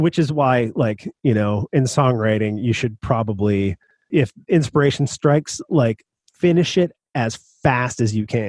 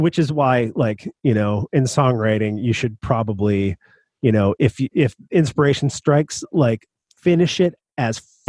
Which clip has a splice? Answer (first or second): first